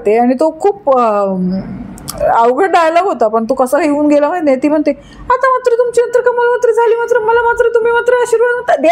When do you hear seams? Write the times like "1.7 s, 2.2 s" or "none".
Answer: none

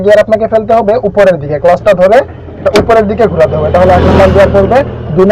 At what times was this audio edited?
none

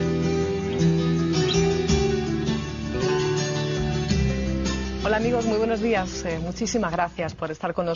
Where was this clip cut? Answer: 1.0 s

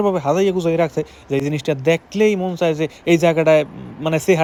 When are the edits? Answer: none

